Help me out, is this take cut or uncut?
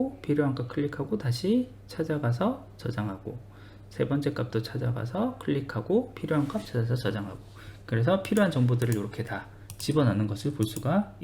uncut